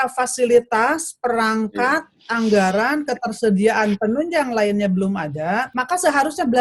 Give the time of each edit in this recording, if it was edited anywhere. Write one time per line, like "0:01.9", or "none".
none